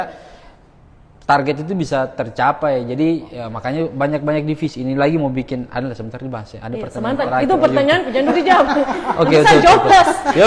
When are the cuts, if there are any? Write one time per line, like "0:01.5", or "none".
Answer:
none